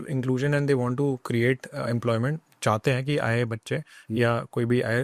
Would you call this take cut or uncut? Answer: uncut